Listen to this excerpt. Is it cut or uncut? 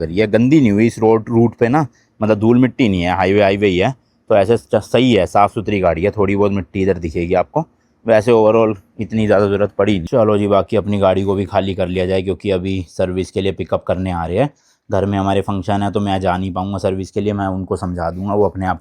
cut